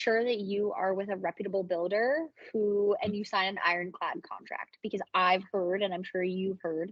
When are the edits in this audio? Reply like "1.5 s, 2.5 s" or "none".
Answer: none